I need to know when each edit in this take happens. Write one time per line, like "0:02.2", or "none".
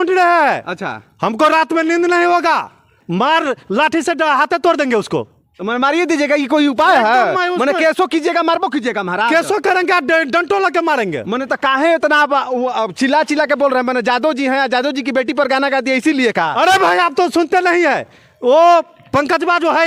none